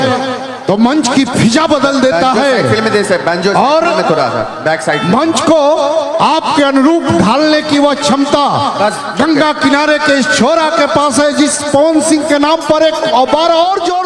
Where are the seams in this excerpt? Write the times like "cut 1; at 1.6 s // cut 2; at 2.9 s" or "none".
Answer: none

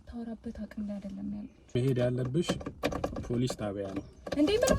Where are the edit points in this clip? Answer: cut 1; at 1.8 s

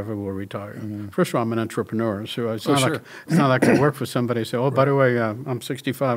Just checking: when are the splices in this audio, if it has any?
none

